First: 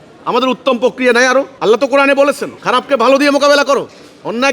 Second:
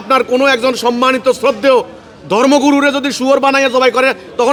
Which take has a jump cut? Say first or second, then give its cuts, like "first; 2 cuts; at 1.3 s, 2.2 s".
first; 2 cuts; at 1.5 s, 2.5 s